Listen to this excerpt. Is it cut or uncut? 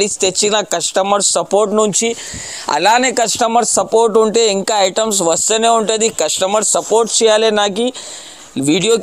uncut